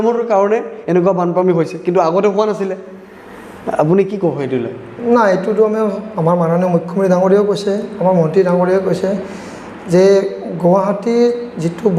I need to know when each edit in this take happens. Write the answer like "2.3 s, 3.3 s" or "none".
none